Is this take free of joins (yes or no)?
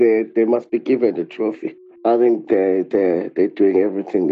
yes